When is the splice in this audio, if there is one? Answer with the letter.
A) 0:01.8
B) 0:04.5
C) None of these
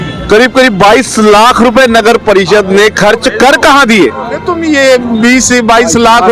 B